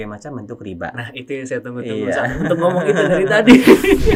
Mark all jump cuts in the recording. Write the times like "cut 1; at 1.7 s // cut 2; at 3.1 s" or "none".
none